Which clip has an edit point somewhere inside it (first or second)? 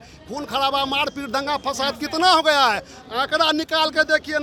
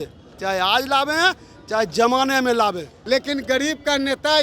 second